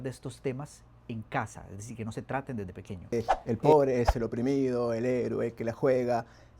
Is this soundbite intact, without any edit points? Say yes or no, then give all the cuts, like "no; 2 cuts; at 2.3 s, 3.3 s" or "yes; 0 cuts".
no; 1 cut; at 3.1 s